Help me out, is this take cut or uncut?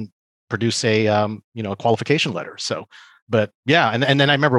uncut